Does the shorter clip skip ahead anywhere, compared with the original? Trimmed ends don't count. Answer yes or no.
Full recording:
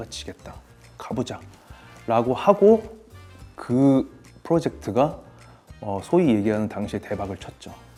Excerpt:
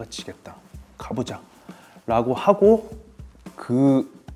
no